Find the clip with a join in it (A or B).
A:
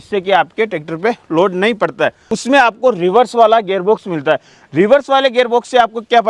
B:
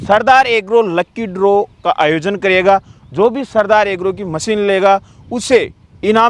A